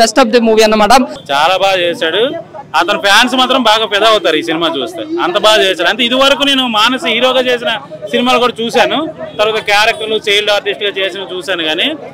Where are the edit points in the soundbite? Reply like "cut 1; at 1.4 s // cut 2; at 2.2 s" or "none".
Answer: cut 1; at 1.2 s